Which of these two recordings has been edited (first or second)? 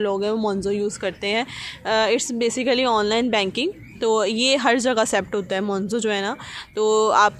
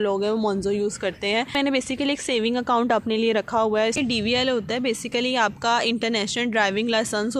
second